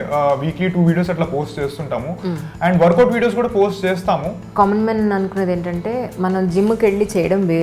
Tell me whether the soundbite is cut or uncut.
cut